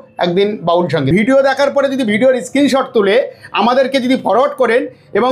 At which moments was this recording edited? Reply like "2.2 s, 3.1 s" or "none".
1.1 s